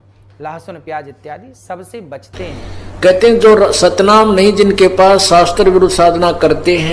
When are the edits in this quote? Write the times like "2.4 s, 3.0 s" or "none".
2.5 s